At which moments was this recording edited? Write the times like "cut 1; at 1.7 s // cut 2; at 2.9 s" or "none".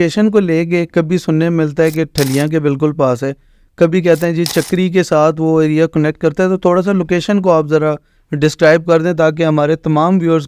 none